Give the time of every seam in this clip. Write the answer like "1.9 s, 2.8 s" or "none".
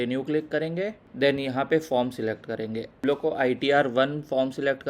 1.0 s